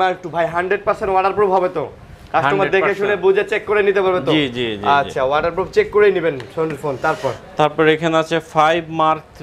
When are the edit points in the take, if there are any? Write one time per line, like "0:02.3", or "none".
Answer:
none